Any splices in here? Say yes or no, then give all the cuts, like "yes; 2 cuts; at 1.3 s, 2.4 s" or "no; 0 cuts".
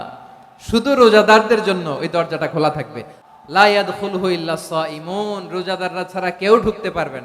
yes; 1 cut; at 3.2 s